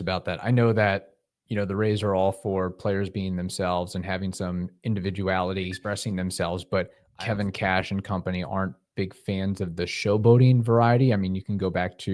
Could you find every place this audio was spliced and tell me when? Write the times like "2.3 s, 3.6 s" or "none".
5.8 s, 7.0 s